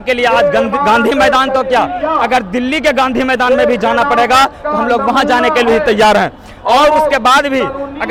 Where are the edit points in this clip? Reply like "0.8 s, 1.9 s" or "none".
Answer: none